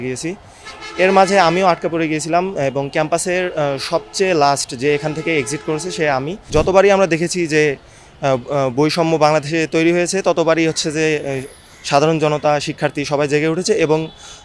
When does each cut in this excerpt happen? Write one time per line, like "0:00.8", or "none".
0:06.4